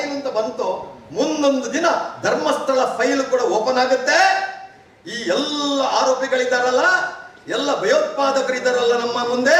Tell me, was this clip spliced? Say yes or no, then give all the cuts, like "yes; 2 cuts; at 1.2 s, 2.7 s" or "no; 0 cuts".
no; 0 cuts